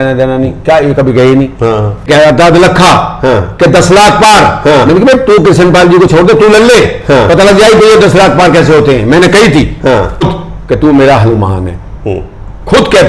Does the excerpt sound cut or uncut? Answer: cut